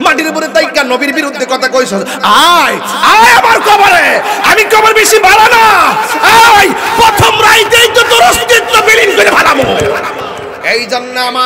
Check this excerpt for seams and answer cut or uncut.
cut